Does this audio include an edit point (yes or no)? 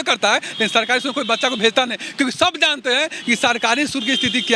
no